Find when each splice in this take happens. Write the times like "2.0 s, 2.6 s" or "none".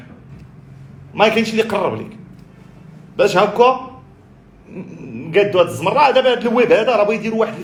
none